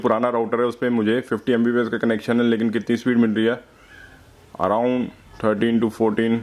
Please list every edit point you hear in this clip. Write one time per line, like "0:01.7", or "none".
none